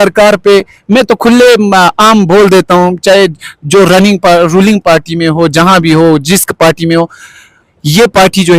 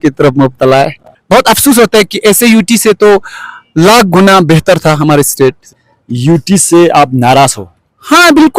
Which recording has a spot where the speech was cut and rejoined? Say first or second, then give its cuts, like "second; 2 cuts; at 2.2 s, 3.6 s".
second; 2 cuts; at 1.1 s, 5.9 s